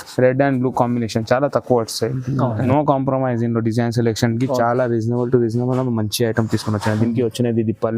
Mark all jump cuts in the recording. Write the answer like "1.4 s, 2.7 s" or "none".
2.6 s